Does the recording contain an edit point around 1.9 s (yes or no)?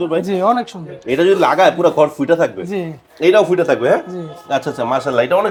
no